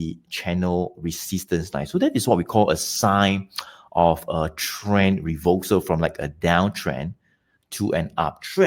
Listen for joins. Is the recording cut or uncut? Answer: uncut